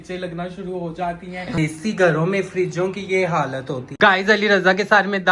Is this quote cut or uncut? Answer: cut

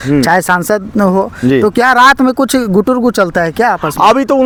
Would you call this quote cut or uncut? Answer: uncut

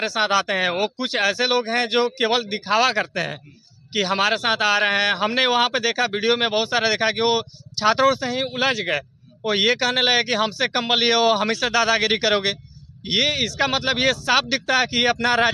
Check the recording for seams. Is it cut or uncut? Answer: uncut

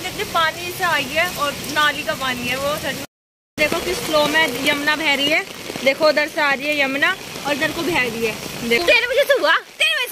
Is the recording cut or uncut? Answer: cut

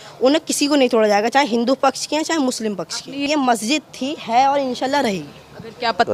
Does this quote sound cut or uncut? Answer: cut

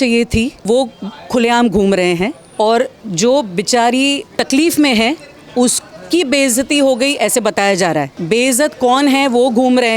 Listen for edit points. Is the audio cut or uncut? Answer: uncut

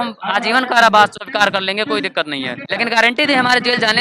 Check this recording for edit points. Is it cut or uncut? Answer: cut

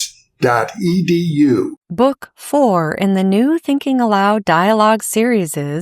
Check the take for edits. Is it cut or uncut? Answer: cut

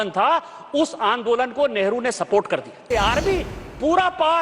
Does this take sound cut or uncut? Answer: cut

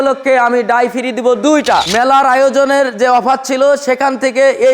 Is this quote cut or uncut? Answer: cut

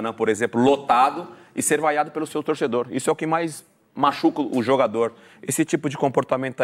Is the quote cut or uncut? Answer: uncut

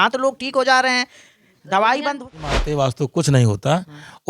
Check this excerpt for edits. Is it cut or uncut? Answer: cut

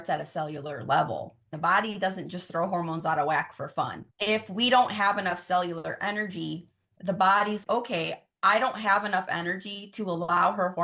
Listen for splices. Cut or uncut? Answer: cut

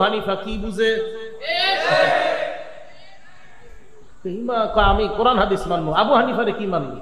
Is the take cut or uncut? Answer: uncut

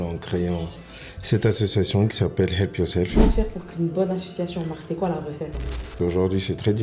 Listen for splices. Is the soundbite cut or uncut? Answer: cut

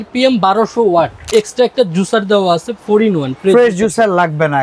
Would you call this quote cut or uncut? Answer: cut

